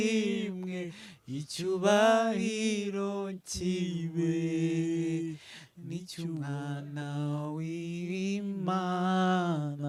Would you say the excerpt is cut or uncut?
uncut